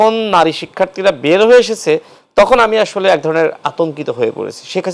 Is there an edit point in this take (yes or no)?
no